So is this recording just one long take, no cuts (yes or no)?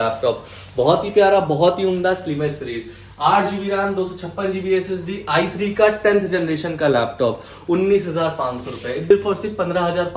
no